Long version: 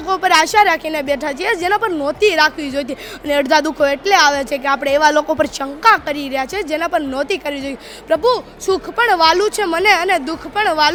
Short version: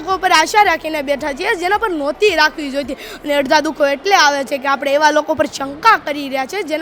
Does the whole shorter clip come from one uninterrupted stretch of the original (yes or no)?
yes